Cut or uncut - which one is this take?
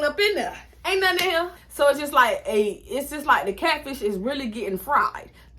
cut